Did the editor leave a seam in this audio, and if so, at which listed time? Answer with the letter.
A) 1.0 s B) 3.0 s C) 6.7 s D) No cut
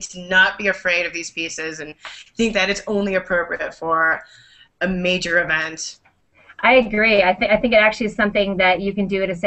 C